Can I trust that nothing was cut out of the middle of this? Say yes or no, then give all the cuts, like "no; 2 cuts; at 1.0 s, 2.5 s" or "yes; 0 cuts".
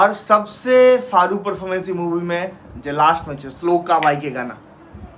yes; 0 cuts